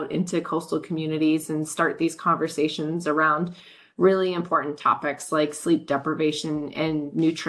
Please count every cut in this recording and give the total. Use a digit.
0